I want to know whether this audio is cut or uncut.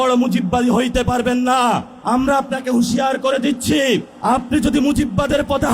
cut